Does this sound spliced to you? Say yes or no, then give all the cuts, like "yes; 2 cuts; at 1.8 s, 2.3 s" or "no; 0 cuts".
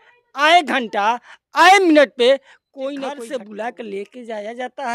yes; 1 cut; at 3.2 s